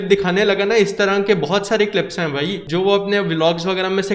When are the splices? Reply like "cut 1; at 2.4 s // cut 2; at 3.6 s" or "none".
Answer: cut 1; at 2.6 s